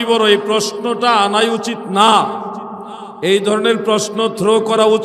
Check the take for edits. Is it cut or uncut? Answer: uncut